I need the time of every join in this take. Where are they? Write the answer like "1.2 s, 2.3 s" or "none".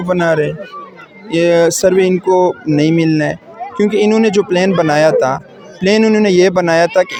none